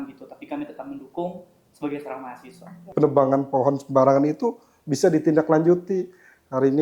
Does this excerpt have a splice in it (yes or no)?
yes